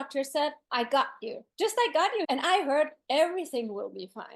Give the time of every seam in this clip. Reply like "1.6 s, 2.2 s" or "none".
2.2 s